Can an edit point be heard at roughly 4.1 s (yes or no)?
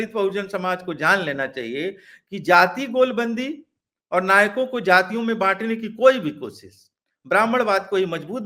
no